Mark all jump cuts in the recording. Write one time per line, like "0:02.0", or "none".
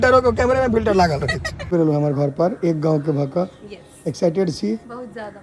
0:01.5